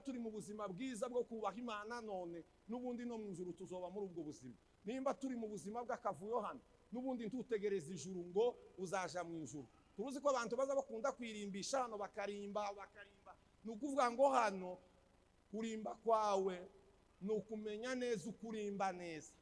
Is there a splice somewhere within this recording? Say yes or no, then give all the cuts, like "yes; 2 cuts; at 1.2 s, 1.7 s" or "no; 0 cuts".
no; 0 cuts